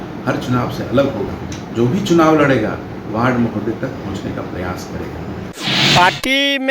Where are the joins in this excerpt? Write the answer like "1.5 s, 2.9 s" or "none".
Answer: 5.5 s